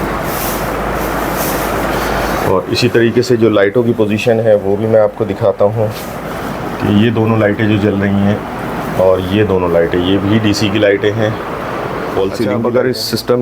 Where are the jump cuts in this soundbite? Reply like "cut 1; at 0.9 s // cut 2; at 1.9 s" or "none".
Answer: cut 1; at 12.5 s